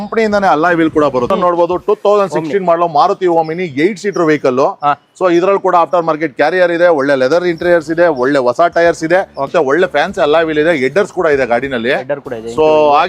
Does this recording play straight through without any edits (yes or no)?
no